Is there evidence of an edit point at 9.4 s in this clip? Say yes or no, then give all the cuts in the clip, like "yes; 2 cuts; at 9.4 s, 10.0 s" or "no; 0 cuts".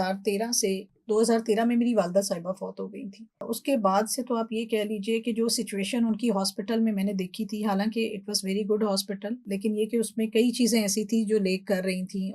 yes; 2 cuts; at 3.4 s, 9.4 s